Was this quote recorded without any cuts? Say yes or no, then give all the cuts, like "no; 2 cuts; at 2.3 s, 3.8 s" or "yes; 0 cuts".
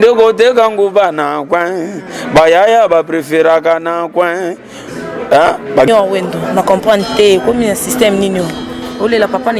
no; 1 cut; at 5.9 s